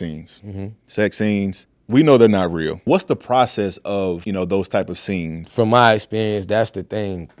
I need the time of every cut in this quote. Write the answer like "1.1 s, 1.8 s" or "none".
2.8 s, 4.2 s, 5.4 s